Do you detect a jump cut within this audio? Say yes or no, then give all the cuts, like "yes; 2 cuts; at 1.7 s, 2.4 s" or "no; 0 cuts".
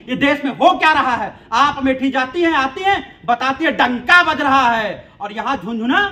no; 0 cuts